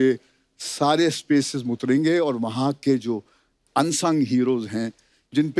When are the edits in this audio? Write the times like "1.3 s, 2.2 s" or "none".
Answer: none

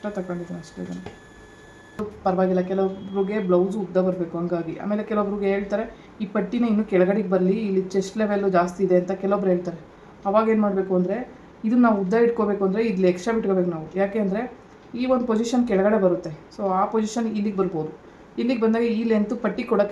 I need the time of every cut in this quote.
2.0 s

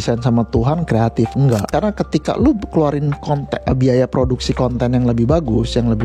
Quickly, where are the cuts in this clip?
1.7 s

